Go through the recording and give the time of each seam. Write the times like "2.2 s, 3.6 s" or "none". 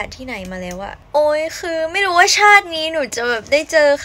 1.0 s